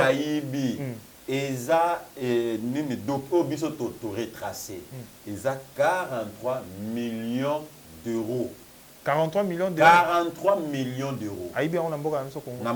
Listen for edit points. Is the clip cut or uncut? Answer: uncut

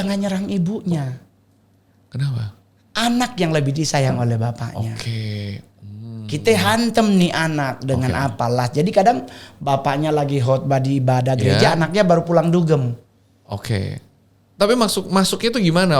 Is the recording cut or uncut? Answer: uncut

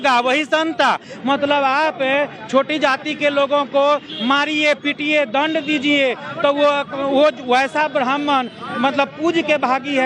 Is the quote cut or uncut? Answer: uncut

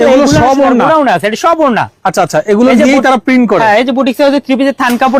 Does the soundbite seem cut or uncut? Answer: uncut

